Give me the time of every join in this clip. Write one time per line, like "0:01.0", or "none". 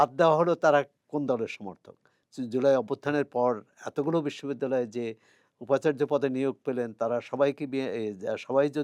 0:02.1